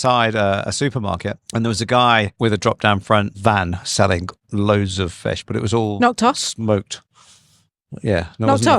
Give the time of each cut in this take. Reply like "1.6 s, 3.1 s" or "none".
1.4 s, 2.3 s, 3.3 s

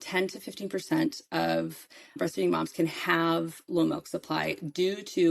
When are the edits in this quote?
none

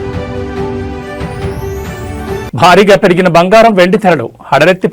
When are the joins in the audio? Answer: none

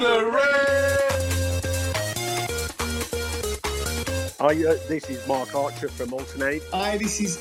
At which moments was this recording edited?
0.9 s

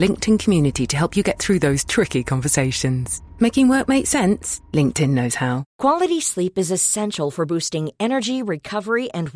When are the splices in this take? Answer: 5.6 s

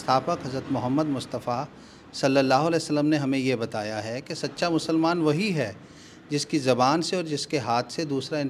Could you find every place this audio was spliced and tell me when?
none

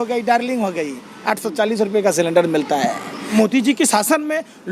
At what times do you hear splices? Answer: 3.1 s

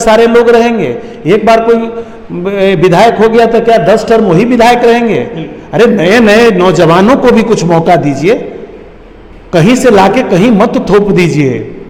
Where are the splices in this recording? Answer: none

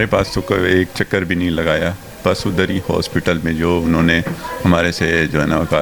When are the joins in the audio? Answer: none

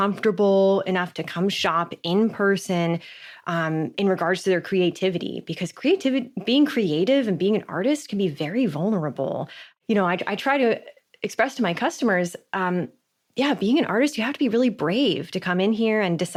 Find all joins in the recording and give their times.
none

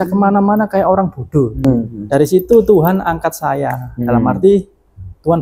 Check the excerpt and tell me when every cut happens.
1.6 s

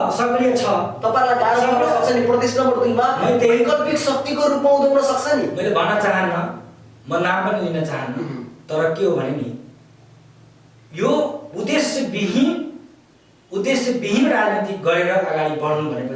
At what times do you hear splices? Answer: none

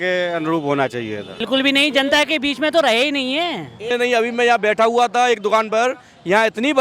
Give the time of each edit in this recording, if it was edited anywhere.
1.4 s, 3.8 s

